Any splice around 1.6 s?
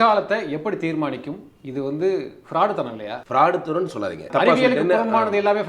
no; 2 cuts; at 3.1 s, 4.3 s

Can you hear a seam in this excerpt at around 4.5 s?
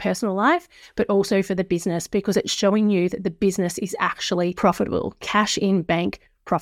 yes; 1 cut; at 4.5 s

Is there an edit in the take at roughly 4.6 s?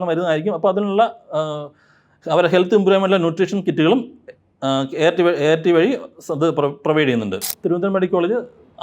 no; 1 cut; at 7.5 s

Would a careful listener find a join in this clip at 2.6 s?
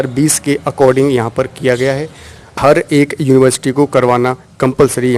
yes; 1 cut; at 2.6 s

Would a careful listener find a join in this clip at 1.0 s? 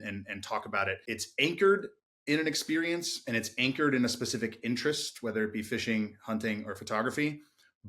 yes; 1 cut; at 1.0 s

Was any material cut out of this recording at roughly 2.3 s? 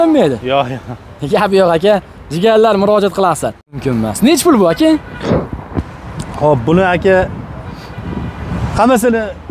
no; 1 cut; at 3.8 s

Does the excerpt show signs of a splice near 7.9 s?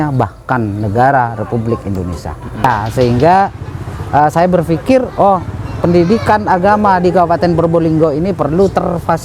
no; 1 cut; at 2.6 s

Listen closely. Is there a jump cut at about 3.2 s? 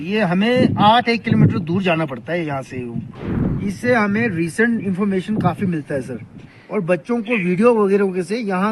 yes; 1 cut; at 3.2 s

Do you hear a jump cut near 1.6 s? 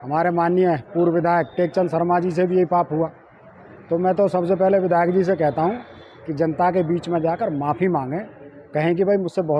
no; 0 cuts

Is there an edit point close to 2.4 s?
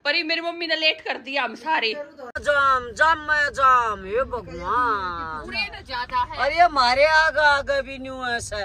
yes; 1 cut; at 2.4 s

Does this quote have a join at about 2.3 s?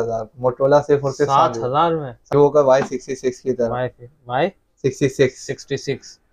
yes; 1 cut; at 2.3 s

